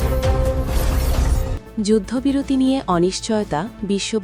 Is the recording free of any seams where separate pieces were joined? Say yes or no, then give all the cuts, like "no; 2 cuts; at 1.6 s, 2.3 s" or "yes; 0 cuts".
yes; 0 cuts